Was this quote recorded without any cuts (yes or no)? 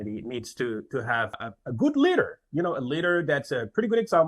no